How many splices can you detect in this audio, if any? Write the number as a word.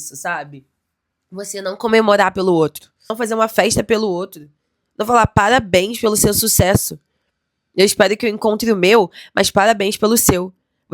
one